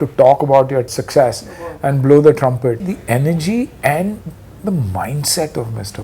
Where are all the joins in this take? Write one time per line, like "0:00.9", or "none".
0:00.9
0:02.9
0:04.5